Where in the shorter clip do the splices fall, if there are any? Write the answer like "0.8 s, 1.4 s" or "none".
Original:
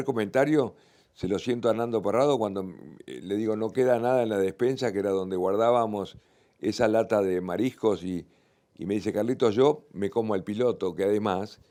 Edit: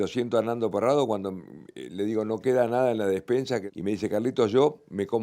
3.6 s